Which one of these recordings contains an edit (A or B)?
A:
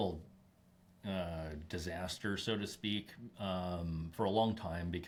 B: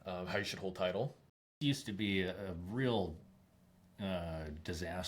B